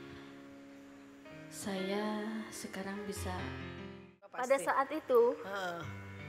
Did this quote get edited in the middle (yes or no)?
yes